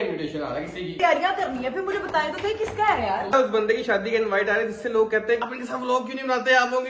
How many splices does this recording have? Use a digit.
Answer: 3